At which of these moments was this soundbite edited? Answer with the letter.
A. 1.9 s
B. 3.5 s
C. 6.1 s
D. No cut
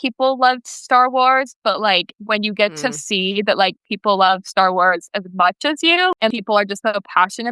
C